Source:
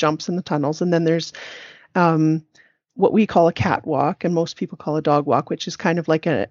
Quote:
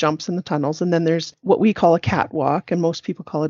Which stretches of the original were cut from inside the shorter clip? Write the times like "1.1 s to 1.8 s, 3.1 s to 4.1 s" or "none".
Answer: 1.3 s to 2.8 s